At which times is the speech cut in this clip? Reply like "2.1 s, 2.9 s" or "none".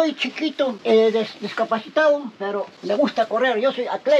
0.8 s, 2.7 s